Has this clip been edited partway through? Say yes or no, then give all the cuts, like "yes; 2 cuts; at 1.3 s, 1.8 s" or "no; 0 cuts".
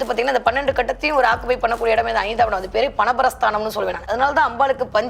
yes; 1 cut; at 4.1 s